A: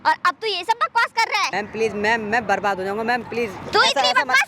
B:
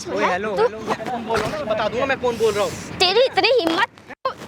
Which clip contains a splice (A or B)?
A